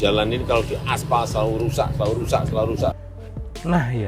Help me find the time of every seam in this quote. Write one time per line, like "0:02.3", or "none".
0:03.0

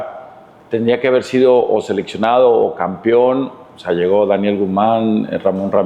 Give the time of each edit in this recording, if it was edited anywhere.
none

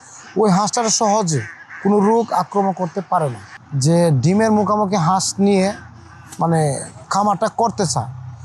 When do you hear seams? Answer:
0:03.5

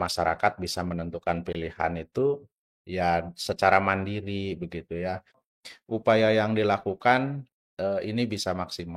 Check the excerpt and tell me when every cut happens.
0:05.5

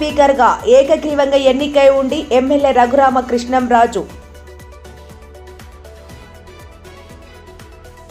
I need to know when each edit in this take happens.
none

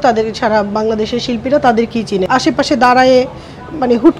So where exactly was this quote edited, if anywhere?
0:02.2

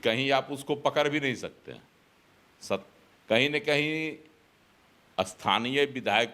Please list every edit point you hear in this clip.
none

